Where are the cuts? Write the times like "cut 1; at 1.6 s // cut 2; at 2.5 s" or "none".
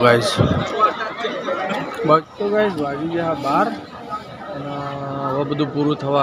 cut 1; at 2.2 s